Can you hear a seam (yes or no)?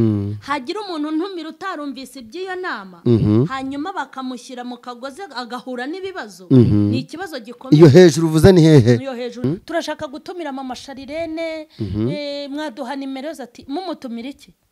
yes